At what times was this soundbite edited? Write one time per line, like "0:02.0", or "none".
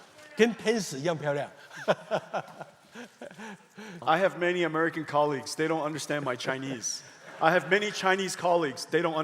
0:04.0

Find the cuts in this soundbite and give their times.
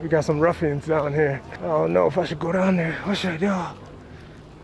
0:01.5

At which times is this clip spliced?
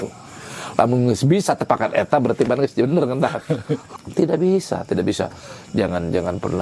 0:03.9

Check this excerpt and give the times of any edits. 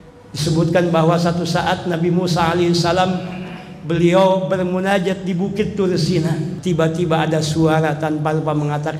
0:06.5

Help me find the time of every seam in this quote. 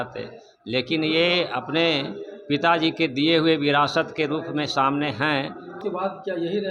0:05.8

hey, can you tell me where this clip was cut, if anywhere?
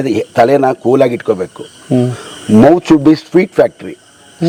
none

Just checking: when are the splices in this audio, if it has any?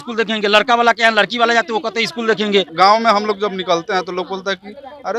0:02.7

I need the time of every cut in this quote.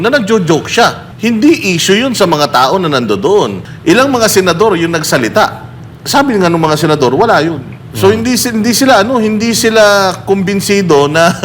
0:01.1
0:03.7

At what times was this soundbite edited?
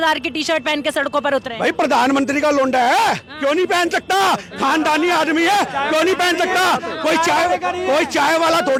none

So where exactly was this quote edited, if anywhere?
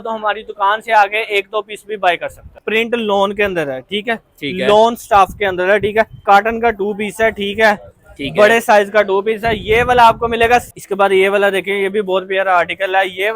0:02.6
0:06.2
0:10.7

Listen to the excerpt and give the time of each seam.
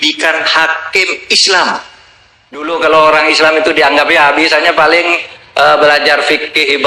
0:02.7

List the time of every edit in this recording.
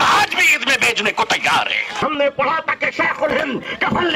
0:02.3

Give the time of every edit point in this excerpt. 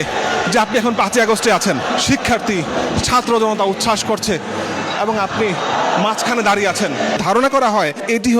0:01.9
0:07.2

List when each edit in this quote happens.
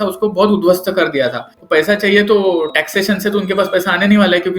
0:01.5

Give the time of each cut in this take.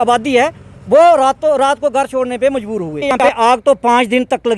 0:03.2

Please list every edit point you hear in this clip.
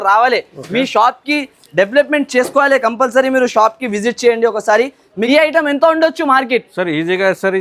0:05.2

